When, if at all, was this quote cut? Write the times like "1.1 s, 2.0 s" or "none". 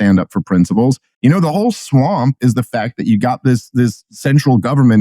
1.1 s